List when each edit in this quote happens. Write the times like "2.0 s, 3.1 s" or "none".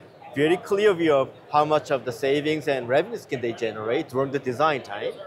none